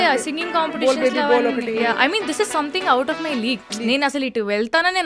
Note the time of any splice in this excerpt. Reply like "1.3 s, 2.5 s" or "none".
none